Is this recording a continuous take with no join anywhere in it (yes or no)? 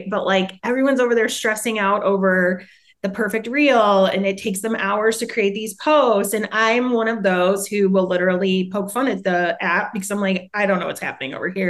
no